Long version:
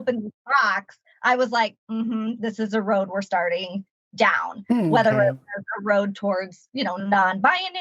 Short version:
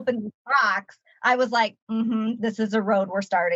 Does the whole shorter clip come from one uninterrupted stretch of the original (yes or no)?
yes